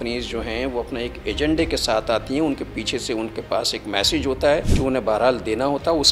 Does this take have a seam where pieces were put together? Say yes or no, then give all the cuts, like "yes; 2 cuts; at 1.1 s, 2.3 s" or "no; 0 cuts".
no; 0 cuts